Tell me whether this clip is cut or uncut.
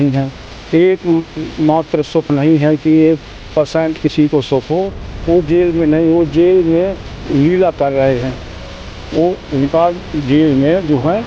uncut